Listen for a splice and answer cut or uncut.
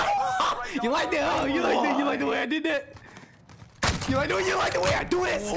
uncut